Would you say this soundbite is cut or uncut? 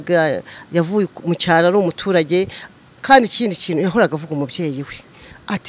uncut